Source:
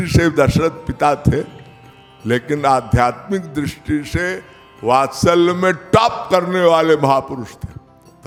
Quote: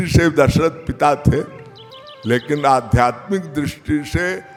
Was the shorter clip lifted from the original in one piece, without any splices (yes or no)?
yes